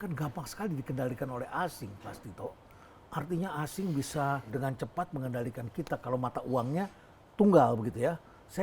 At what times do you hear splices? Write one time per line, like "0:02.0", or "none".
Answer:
none